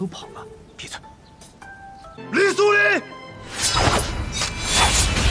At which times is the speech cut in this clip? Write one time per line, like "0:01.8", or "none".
0:02.2